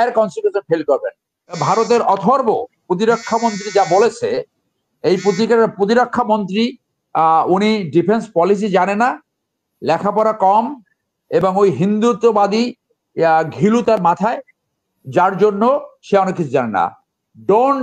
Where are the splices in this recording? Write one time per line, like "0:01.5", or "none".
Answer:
0:01.6

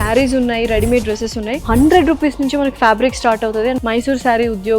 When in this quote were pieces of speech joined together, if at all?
0:01.5
0:03.8

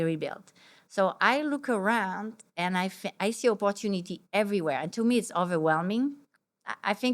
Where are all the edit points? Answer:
0:06.2

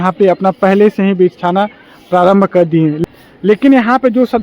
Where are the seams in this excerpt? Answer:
0:03.0

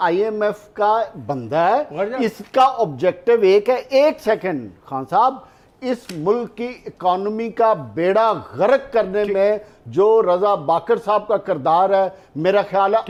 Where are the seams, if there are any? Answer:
none

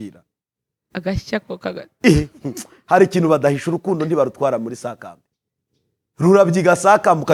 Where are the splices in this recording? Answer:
none

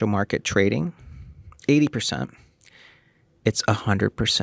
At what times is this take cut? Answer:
none

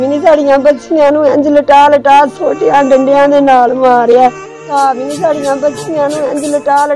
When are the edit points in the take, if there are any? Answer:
0:04.6

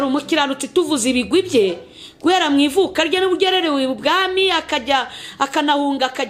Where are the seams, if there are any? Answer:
none

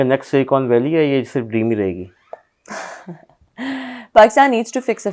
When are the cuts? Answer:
none

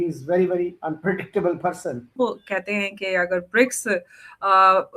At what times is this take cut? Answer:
0:02.2

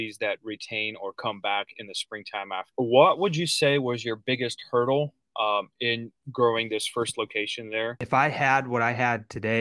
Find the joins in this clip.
0:02.6
0:08.0

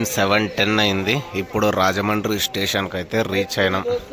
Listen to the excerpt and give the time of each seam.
none

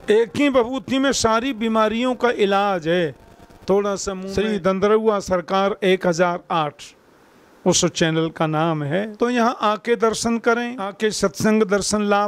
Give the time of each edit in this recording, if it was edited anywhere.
0:04.2
0:09.1
0:10.9

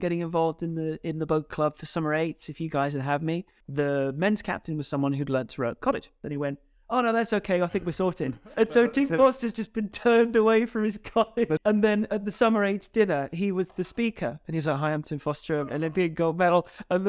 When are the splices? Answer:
0:03.6
0:06.2
0:08.5
0:11.6

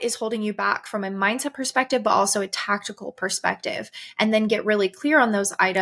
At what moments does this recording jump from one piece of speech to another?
none

